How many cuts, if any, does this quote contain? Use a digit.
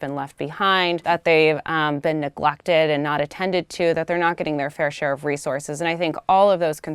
1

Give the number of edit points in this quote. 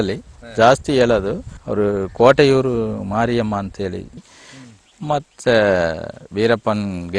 1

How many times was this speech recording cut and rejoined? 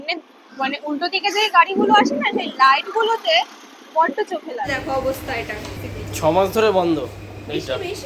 1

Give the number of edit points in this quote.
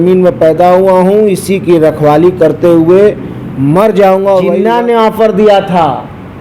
1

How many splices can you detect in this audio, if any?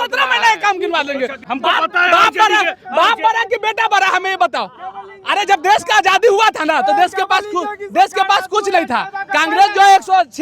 1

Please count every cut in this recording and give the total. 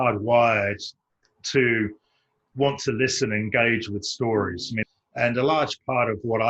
1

